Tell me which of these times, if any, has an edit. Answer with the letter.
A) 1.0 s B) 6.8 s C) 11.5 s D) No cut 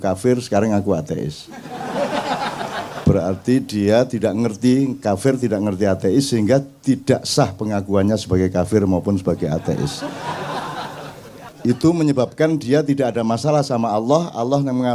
C